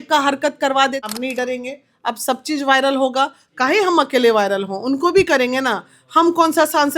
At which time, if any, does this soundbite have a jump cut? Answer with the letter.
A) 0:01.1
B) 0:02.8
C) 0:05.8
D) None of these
A